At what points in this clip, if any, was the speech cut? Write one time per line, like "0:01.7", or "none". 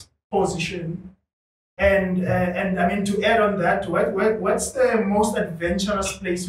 none